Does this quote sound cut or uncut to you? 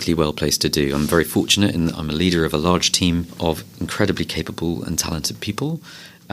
cut